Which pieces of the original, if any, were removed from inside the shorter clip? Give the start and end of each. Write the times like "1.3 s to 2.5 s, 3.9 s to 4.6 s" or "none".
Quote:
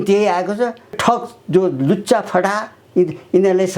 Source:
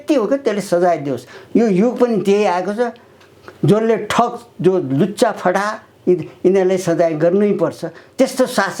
3.1 s to 4.1 s